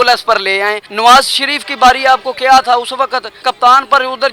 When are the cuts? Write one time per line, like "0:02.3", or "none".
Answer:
0:00.9
0:03.4